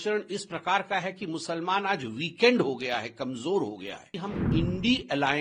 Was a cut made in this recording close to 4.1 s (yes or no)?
yes